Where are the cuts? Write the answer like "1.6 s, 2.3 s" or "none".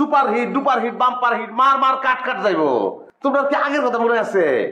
3.0 s

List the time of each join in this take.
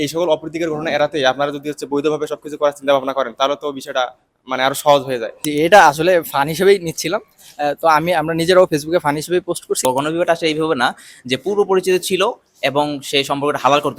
5.3 s, 9.7 s

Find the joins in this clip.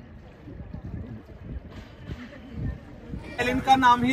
3.2 s

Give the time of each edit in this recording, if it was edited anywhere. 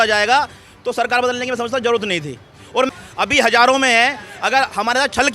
2.9 s

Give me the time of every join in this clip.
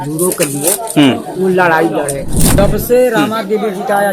2.6 s

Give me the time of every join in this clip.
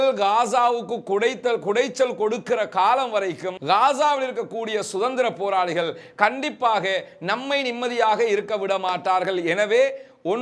none

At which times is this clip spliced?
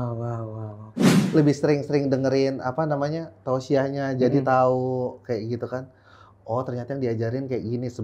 1.0 s

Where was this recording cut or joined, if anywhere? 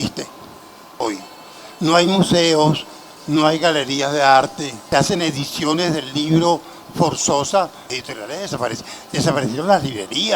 1.0 s, 4.8 s, 7.9 s

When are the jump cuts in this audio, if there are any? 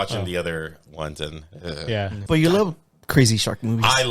2.2 s

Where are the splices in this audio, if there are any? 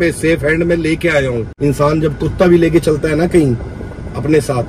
1.5 s

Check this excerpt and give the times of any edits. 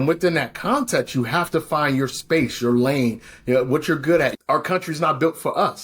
4.3 s

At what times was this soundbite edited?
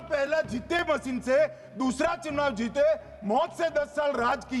none

